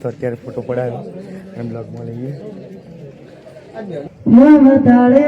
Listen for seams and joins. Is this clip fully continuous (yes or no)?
no